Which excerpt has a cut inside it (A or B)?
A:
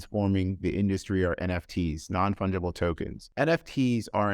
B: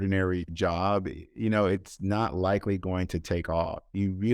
A